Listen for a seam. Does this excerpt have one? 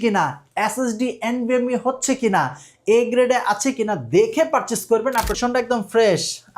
yes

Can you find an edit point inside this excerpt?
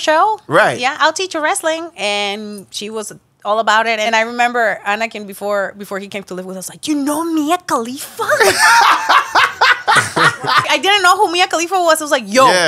yes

